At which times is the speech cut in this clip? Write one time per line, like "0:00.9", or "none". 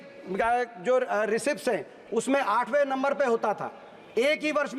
none